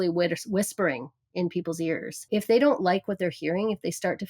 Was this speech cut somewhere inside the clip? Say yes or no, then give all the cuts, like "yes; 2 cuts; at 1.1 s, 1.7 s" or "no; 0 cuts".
yes; 1 cut; at 2.1 s